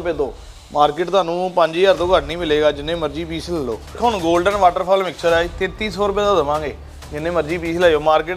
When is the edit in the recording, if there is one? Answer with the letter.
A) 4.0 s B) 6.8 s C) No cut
A